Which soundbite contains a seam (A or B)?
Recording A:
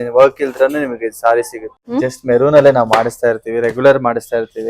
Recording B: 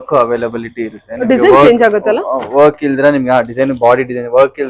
A